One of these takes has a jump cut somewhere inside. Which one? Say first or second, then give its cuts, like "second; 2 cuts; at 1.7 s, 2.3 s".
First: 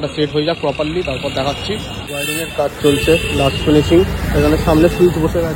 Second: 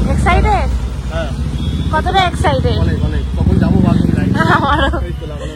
first; 1 cut; at 2.1 s